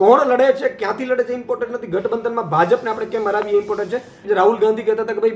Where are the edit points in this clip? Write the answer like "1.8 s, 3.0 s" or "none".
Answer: 4.2 s